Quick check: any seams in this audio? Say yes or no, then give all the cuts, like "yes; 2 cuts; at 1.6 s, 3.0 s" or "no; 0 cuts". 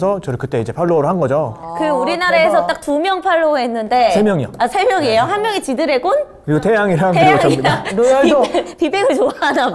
no; 0 cuts